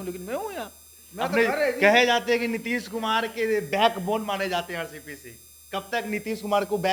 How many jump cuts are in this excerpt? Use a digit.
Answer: 0